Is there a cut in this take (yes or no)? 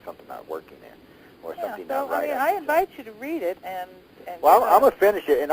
yes